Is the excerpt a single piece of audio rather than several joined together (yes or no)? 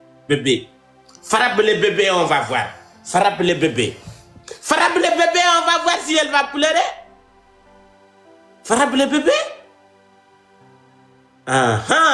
no